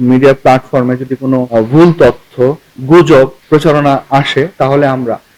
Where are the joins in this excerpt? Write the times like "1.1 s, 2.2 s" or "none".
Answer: 1.5 s, 3.4 s